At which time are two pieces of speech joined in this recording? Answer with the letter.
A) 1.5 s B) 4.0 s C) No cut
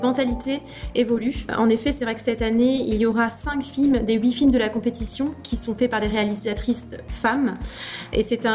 A